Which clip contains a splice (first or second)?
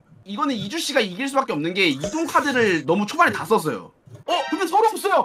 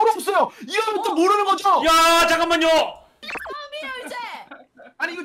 second